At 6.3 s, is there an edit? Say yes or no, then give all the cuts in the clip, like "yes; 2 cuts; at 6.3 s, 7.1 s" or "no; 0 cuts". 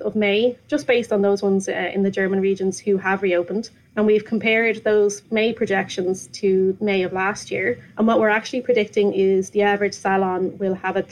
no; 2 cuts; at 3.8 s, 7.9 s